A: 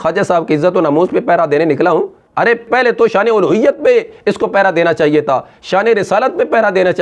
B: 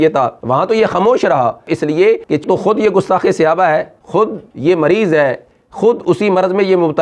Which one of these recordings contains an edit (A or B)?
B